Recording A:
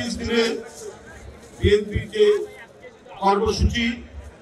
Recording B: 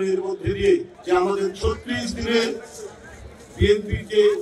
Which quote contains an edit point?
B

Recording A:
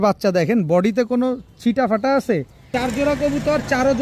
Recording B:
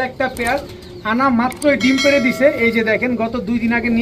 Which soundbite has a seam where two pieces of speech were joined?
A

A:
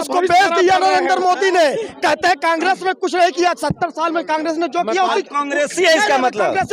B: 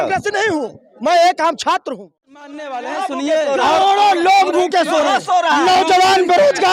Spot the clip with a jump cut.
B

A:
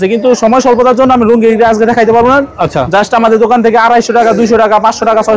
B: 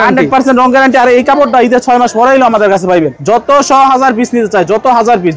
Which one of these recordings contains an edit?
B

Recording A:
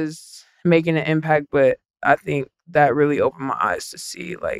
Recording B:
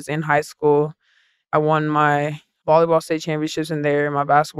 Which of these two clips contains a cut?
B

